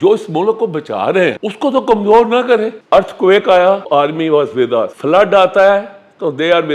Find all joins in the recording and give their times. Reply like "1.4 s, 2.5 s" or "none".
1.4 s, 2.8 s, 3.8 s, 4.9 s